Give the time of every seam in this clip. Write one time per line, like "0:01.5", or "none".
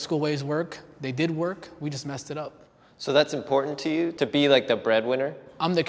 0:04.1